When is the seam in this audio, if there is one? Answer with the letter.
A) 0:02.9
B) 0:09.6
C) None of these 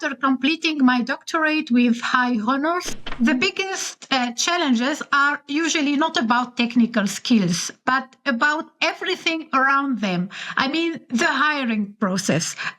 A